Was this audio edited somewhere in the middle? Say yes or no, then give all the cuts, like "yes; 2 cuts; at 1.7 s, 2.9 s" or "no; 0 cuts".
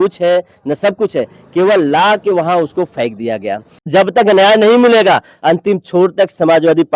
yes; 1 cut; at 3.9 s